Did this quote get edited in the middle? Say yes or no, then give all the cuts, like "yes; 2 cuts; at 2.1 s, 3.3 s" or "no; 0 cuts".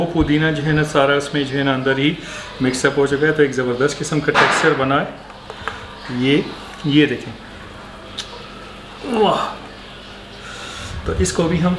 no; 0 cuts